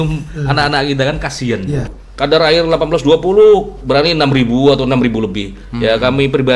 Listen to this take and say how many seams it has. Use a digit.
1